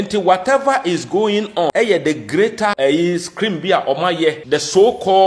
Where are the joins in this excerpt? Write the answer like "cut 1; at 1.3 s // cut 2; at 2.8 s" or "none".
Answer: cut 1; at 1.7 s // cut 2; at 2.8 s // cut 3; at 4.4 s